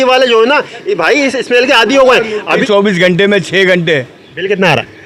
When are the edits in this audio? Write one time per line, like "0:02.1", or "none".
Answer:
0:02.6